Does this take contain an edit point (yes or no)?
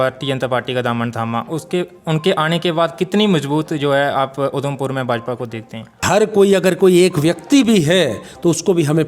yes